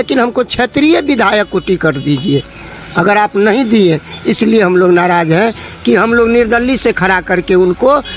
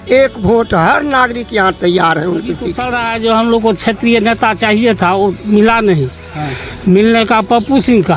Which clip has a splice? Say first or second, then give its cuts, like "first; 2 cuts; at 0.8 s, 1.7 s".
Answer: second; 1 cut; at 2.8 s